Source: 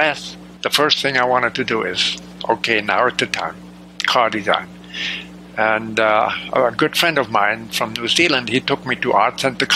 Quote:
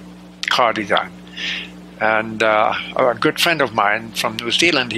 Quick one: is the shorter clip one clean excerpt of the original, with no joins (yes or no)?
yes